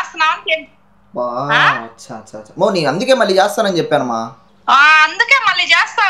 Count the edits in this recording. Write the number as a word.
one